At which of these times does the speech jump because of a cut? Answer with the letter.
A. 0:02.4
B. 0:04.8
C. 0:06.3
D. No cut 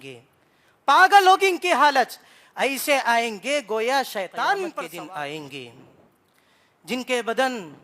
B